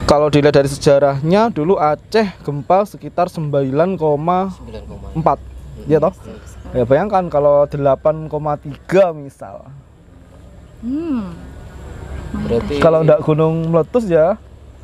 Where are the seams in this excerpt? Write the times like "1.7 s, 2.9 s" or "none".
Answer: none